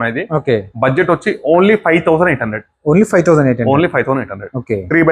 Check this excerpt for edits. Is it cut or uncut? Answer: uncut